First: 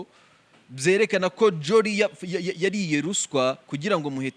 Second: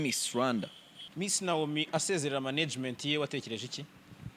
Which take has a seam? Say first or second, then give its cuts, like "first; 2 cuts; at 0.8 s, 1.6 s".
second; 1 cut; at 1.1 s